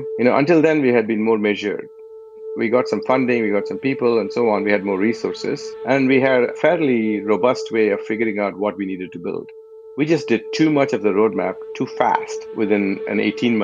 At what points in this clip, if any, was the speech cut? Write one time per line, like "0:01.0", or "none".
0:02.4
0:06.5
0:09.6